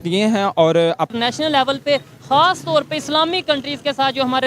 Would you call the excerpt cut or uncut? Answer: cut